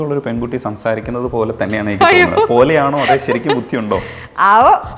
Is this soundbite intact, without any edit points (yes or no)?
yes